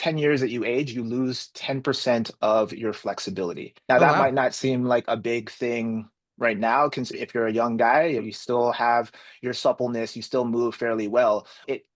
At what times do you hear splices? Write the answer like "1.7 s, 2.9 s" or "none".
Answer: 3.7 s